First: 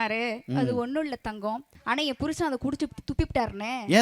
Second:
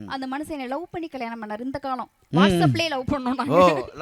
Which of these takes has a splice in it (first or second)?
first